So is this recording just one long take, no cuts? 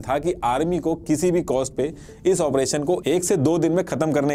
yes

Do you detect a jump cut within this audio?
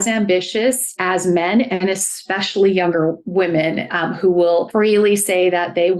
yes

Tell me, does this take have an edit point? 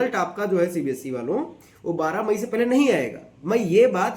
no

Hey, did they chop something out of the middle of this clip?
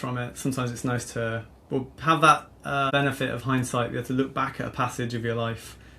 yes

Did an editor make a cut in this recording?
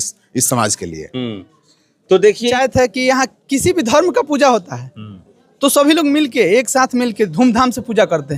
yes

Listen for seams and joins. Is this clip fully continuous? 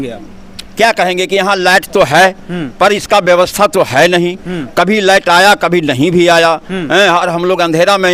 yes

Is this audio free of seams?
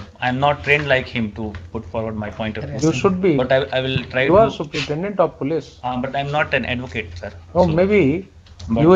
yes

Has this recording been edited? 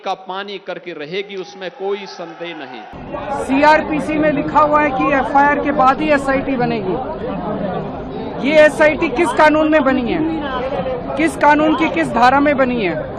yes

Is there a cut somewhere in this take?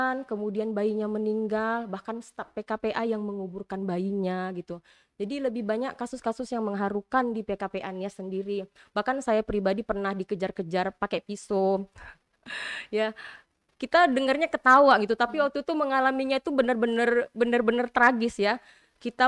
no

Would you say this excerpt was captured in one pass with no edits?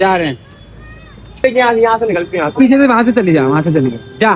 no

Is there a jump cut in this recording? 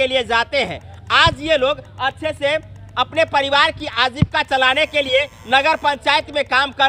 no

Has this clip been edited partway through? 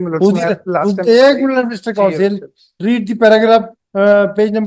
no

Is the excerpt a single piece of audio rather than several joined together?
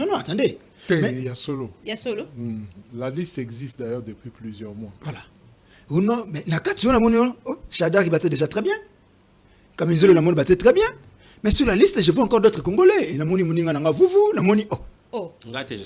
yes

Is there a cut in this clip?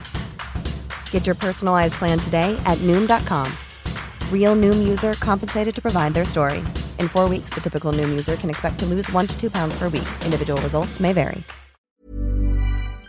yes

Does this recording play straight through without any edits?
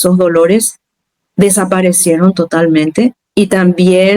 no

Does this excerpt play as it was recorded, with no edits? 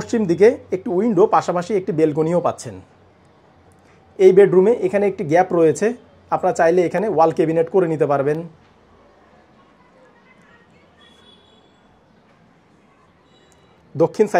yes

